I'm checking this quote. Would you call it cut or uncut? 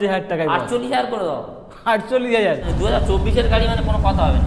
cut